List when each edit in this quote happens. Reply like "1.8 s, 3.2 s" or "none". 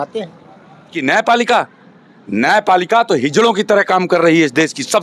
0.9 s